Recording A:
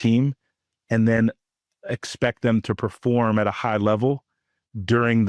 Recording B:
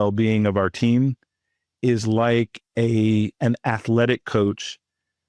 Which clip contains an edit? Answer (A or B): B